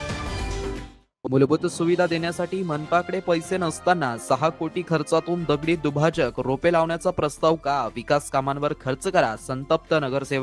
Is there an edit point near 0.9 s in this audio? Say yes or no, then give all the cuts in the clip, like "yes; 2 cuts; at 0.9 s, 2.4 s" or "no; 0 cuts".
yes; 1 cut; at 0.9 s